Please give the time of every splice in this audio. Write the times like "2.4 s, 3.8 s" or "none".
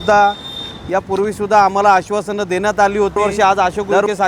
3.2 s